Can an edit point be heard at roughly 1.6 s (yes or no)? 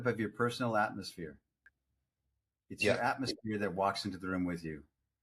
no